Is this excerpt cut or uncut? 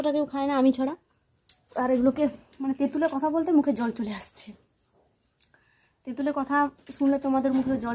uncut